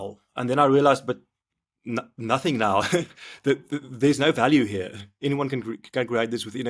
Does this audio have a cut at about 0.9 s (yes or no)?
no